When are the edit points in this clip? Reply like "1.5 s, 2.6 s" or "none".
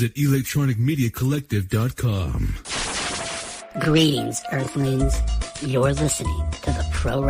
2.6 s